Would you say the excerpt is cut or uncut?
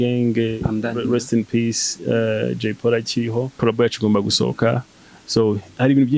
cut